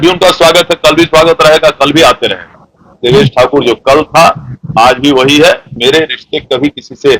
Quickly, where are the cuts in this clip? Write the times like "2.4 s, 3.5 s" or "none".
2.8 s, 5.7 s